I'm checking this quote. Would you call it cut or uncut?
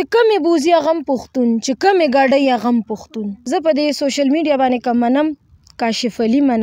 cut